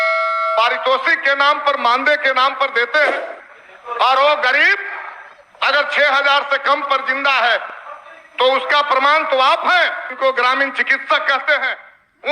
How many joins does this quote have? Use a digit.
1